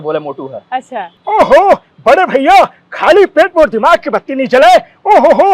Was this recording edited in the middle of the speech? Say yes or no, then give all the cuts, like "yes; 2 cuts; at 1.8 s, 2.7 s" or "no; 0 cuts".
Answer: yes; 1 cut; at 1.1 s